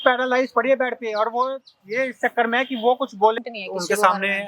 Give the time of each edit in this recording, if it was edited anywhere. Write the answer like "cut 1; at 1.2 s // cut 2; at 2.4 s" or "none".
cut 1; at 3.4 s